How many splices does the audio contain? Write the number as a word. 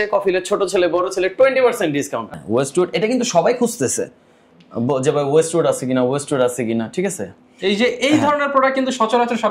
one